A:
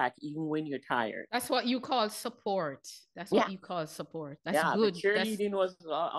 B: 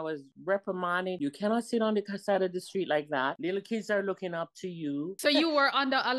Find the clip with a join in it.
B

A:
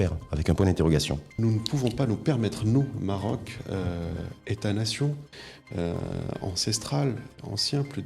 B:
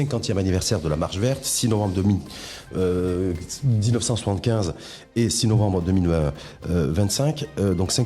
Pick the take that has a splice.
A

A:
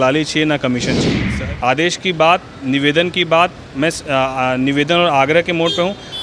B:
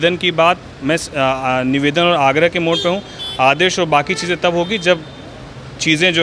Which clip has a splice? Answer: A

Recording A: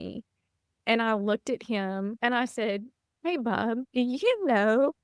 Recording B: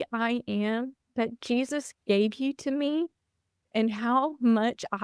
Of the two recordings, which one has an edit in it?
A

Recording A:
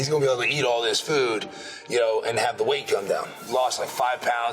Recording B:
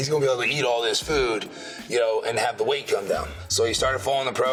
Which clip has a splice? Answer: A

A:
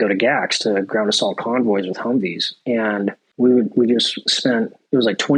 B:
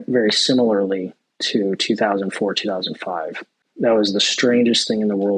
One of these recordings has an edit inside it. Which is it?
A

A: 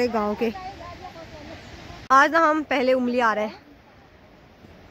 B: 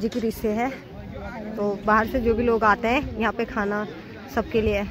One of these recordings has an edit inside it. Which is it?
A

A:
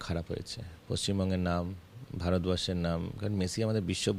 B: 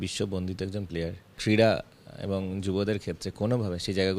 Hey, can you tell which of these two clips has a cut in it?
B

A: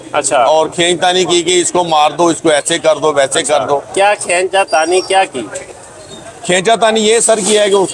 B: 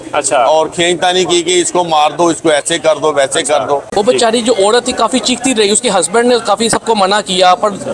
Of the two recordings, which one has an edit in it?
B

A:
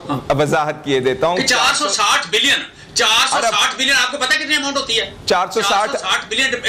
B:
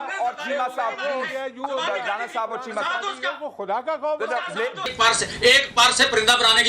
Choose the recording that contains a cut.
B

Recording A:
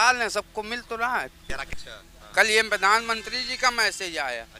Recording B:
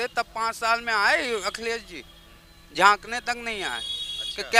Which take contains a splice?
A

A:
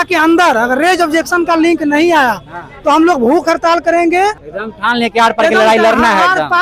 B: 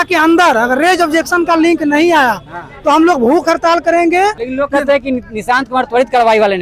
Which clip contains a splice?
B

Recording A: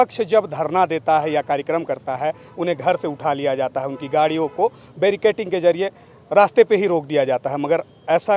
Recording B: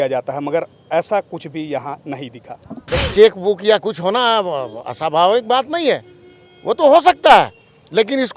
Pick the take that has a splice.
B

